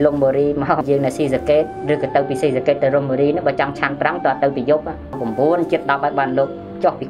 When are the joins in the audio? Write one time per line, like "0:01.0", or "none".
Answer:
0:00.8
0:05.2

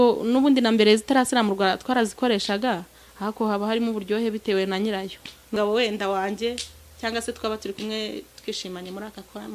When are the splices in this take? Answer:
0:05.5

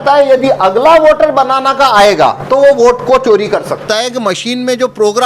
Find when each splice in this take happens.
0:03.8

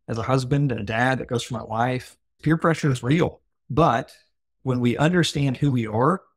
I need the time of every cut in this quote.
0:02.4
0:04.5

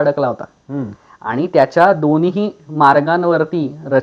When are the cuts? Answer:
none

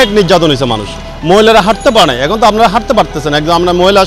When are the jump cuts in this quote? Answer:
none

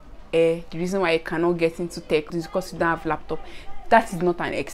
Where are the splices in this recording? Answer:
0:02.3

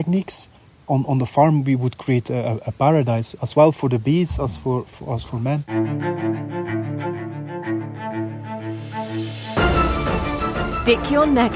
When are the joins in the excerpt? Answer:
0:05.6

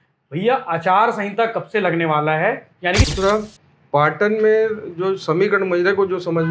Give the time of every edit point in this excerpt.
0:03.1

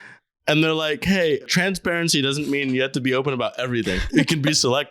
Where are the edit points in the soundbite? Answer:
0:01.4
0:04.0

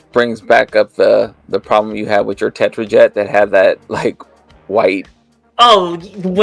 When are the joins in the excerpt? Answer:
none

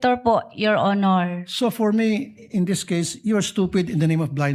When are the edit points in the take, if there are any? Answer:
none

